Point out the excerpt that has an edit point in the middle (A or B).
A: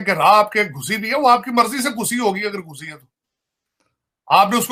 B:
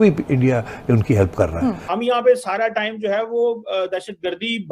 B